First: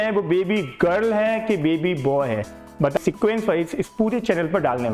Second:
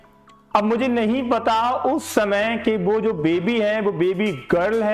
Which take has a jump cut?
first; 1 cut; at 3.0 s

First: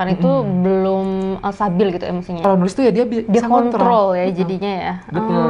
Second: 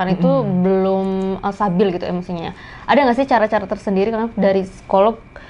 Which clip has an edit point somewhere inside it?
first; 1 cut; at 2.4 s

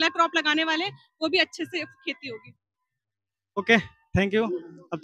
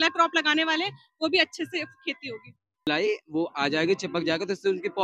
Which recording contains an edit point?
second; 1 cut; at 2.9 s

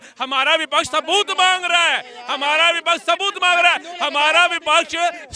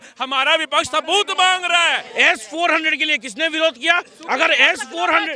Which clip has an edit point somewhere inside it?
second; 1 cut; at 2.1 s

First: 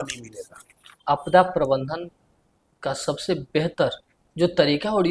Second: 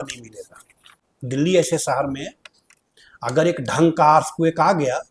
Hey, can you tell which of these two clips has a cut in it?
first; 1 cut; at 1.0 s

